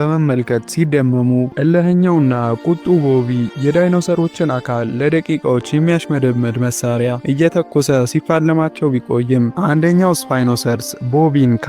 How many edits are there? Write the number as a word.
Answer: one